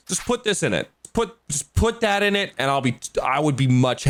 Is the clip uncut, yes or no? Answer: yes